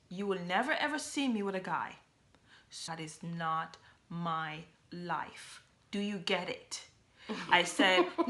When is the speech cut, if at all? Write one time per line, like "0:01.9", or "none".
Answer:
0:02.9